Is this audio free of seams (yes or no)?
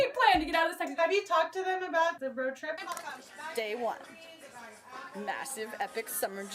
no